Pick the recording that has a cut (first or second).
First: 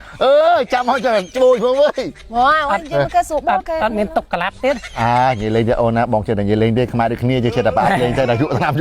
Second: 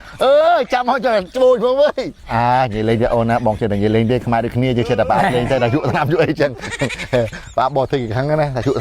second